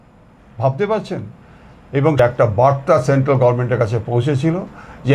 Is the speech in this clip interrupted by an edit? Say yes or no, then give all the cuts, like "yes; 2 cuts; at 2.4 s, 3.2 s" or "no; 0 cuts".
yes; 1 cut; at 2.2 s